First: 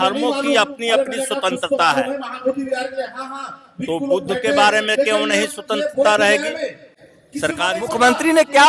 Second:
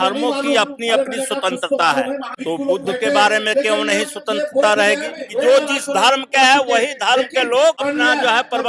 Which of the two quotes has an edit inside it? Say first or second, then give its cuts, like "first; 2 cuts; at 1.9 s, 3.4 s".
second; 3 cuts; at 2.3 s, 5.2 s, 7.8 s